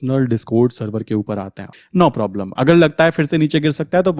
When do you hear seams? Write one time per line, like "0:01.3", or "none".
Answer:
0:01.7